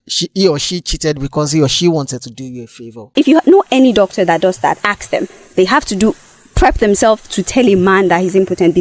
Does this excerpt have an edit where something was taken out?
yes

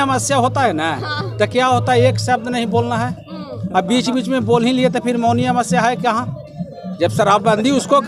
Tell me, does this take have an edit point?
no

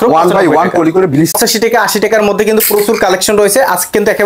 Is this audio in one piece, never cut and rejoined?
no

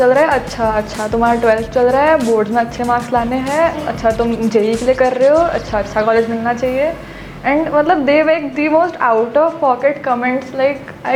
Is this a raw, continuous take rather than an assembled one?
yes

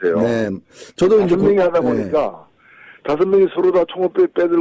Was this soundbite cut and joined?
no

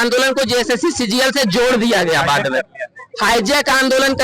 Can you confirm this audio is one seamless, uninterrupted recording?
yes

